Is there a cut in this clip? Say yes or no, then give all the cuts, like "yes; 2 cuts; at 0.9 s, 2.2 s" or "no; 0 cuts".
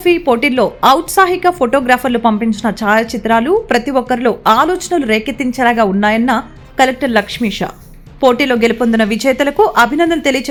no; 0 cuts